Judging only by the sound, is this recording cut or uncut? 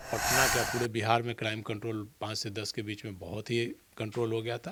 uncut